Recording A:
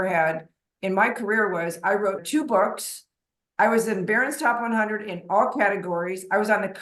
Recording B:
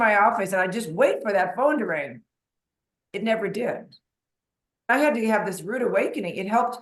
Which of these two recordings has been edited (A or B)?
B